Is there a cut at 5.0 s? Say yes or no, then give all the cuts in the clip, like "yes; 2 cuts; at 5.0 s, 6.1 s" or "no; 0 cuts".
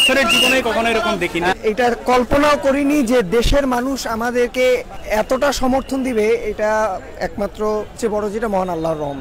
yes; 3 cuts; at 1.6 s, 5.0 s, 7.9 s